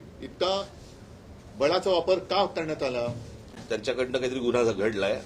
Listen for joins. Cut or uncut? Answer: cut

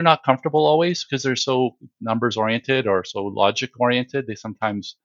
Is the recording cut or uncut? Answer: uncut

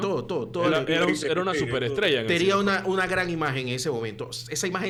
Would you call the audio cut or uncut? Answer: uncut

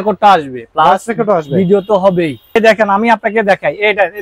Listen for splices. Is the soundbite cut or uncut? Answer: cut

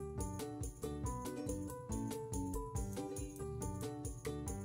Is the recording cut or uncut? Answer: uncut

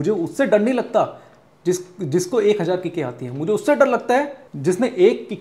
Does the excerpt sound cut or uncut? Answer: cut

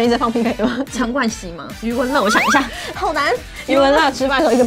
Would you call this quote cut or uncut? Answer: uncut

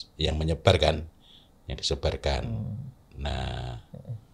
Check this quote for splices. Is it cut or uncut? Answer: uncut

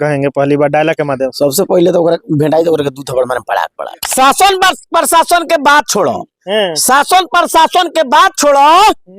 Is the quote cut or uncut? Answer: cut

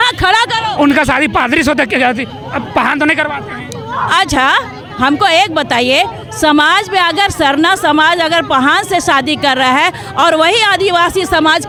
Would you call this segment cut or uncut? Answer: uncut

